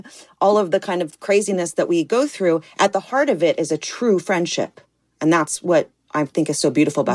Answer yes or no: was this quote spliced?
no